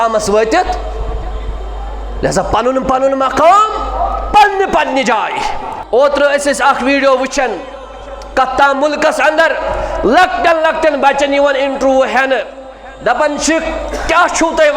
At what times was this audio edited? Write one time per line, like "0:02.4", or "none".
0:05.8